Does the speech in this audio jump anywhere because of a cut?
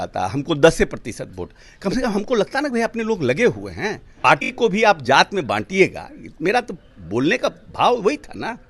yes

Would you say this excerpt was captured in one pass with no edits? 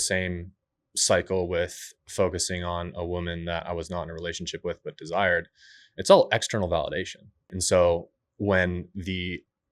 no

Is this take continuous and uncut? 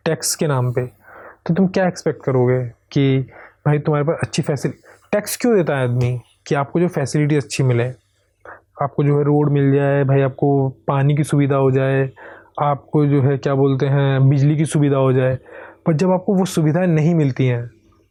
yes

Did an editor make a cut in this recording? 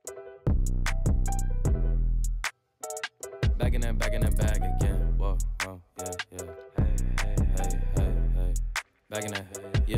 no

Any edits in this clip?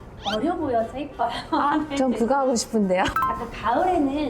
yes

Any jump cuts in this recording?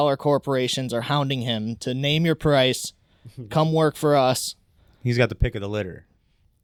no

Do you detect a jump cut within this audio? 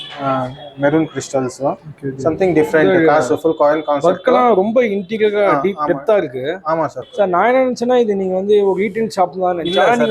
yes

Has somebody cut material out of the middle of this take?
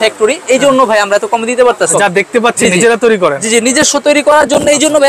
yes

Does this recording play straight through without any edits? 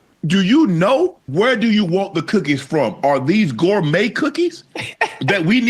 no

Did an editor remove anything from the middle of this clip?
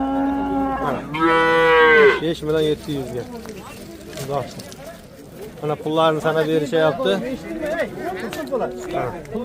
no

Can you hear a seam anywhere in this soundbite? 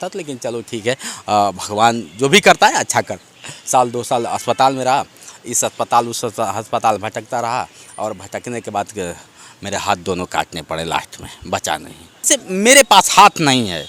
yes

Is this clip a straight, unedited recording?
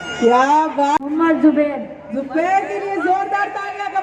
no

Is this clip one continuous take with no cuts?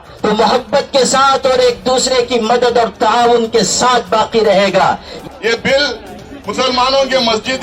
no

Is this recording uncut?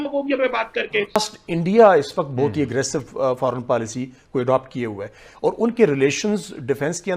no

